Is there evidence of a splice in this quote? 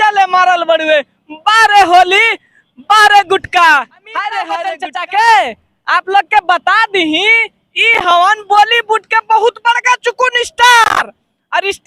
yes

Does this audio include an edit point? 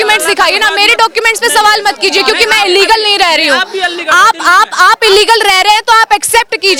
no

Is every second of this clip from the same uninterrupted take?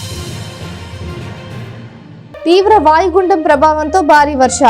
yes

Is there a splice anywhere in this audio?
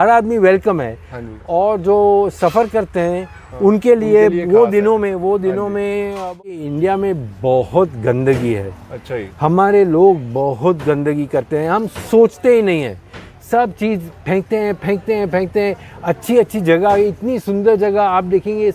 yes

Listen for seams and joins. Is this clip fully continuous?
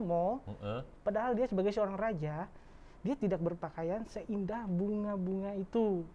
yes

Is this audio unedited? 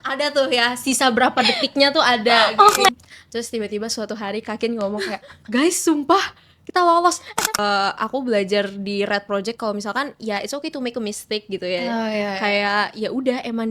no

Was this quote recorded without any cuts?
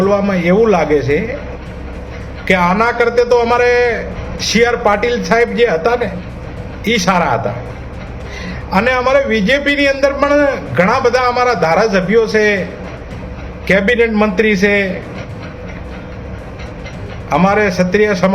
no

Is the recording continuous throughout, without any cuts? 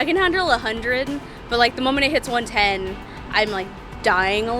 yes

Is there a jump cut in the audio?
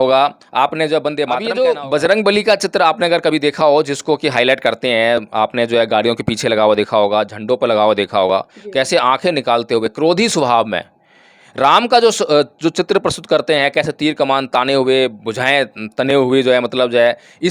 yes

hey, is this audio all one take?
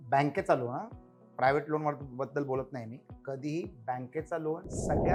yes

